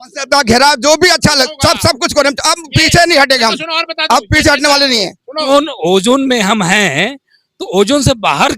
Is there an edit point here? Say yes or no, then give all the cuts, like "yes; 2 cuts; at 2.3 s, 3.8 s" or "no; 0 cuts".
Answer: yes; 1 cut; at 5.5 s